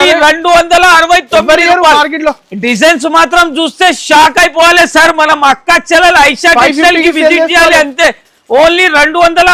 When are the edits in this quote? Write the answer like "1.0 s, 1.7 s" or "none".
none